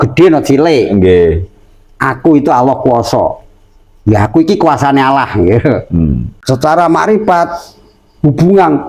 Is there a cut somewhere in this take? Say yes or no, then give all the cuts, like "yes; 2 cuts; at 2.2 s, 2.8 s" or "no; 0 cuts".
yes; 1 cut; at 6.3 s